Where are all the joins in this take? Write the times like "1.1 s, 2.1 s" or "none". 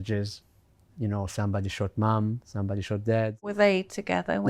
3.5 s